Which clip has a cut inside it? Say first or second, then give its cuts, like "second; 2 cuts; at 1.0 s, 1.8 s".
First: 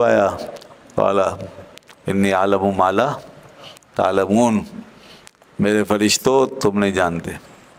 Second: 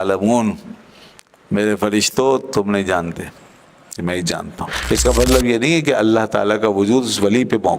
second; 1 cut; at 4.8 s